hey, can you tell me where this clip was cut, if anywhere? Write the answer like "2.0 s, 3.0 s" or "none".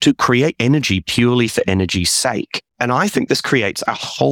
none